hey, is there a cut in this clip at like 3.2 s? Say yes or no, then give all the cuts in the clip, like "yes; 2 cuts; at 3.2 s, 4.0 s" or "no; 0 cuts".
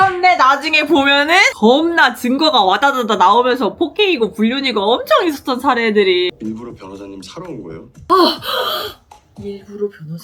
no; 3 cuts; at 1.5 s, 6.3 s, 8.1 s